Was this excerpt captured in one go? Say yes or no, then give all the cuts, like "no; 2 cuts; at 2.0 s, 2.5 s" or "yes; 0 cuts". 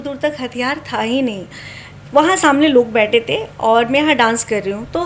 yes; 0 cuts